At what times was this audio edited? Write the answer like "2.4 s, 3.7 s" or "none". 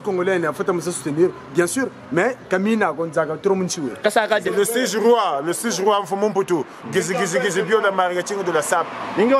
4.5 s